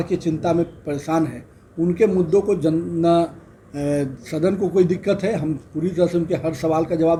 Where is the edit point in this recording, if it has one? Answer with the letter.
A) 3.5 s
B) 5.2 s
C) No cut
C